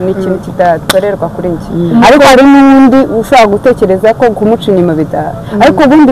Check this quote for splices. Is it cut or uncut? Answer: uncut